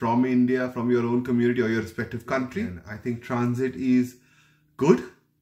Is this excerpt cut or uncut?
cut